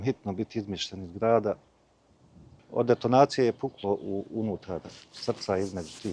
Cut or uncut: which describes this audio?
cut